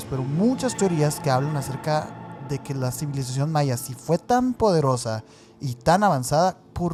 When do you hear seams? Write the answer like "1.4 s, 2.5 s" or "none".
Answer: none